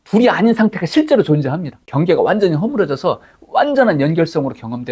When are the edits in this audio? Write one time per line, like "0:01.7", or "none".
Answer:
0:01.8